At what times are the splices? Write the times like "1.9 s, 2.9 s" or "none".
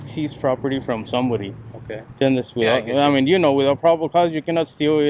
none